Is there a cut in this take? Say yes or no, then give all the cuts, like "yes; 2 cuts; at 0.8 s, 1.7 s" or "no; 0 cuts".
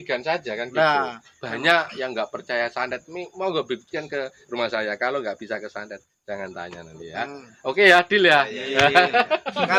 no; 0 cuts